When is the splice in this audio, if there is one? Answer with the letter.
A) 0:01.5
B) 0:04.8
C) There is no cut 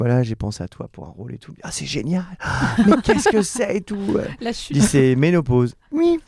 C